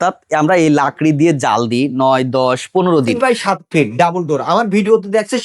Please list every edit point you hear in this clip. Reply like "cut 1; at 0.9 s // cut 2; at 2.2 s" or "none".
cut 1; at 3.1 s